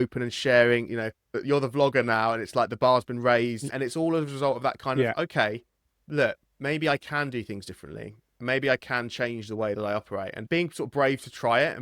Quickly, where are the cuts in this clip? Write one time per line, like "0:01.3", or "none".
0:10.5